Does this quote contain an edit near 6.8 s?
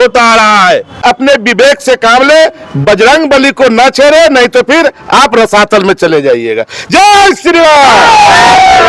no; 1 cut; at 1.2 s

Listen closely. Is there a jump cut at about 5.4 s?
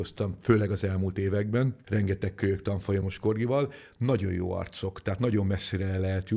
no; 1 cut; at 1.8 s

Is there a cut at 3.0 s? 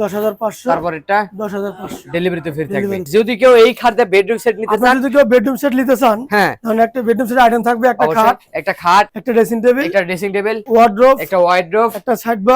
yes; 3 cuts; at 3.0 s, 9.2 s, 10.6 s

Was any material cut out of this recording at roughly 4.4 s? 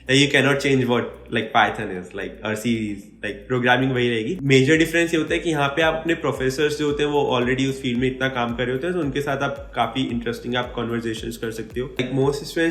yes; 2 cuts; at 4.4 s, 12.0 s

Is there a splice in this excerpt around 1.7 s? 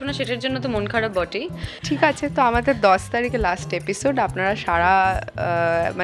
yes; 1 cut; at 1.7 s

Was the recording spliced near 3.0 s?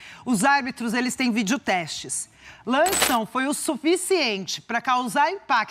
yes; 1 cut; at 3.0 s

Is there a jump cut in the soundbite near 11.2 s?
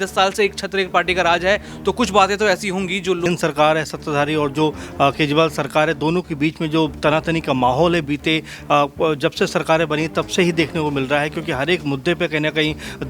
no; 2 cuts; at 3.3 s, 9.3 s

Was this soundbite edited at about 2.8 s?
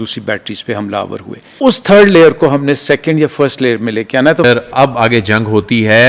no; 2 cuts; at 1.5 s, 4.4 s

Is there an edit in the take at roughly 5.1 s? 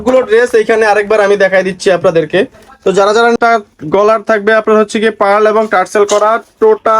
no; 1 cut; at 3.4 s

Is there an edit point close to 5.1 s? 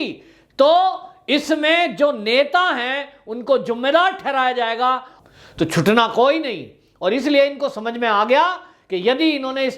yes; 1 cut; at 5.1 s

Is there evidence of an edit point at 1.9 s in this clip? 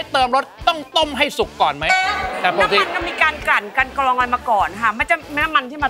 yes; 1 cut; at 1.9 s

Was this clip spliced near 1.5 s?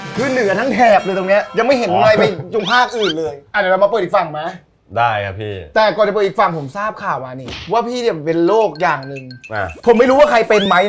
no; 0 cuts

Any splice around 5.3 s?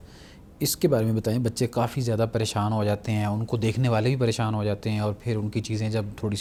no; 0 cuts

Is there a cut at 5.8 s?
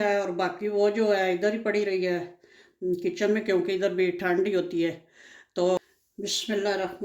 yes; 1 cut; at 5.8 s

